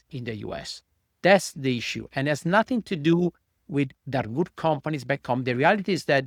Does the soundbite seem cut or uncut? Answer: uncut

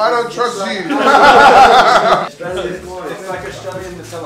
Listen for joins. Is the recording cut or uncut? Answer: cut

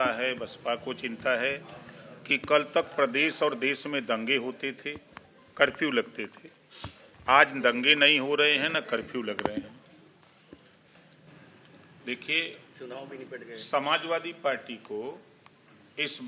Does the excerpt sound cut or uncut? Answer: cut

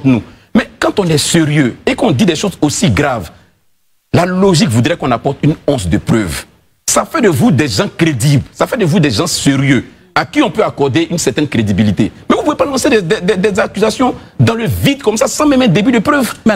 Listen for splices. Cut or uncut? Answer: uncut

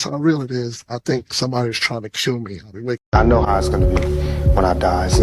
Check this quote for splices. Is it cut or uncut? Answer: cut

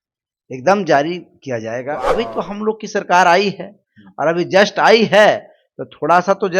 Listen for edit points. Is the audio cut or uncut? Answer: cut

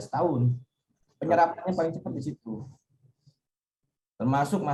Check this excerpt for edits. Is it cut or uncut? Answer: uncut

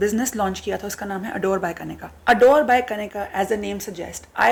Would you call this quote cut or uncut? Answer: uncut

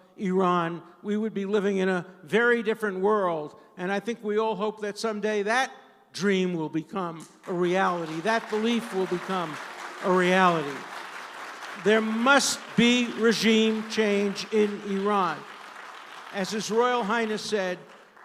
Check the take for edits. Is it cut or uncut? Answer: uncut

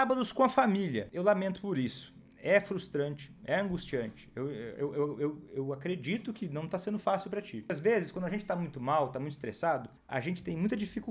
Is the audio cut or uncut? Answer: cut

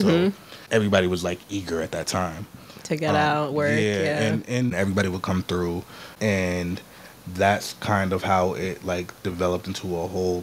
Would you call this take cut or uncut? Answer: cut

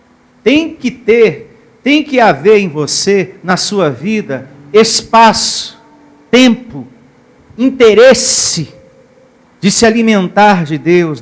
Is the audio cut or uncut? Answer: uncut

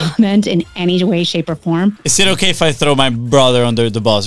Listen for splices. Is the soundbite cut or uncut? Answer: cut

